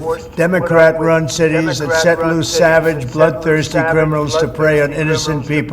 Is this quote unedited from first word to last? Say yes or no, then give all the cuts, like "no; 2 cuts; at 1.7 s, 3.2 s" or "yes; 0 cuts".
no; 1 cut; at 4.5 s